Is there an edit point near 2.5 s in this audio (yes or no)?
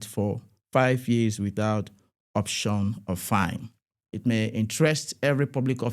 no